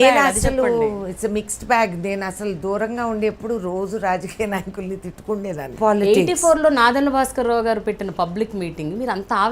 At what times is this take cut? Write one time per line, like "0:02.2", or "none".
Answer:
0:05.7